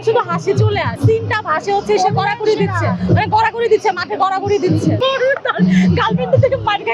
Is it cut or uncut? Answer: cut